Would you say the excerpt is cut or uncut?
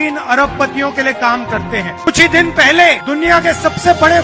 uncut